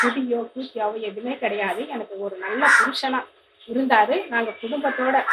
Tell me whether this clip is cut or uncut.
uncut